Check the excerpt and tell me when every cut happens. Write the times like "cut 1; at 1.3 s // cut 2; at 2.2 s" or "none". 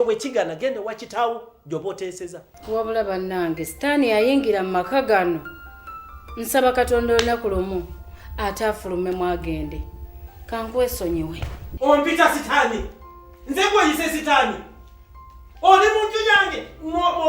cut 1; at 2.5 s